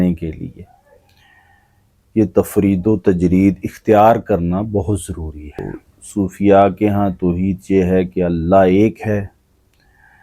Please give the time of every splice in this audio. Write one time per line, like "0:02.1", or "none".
0:05.6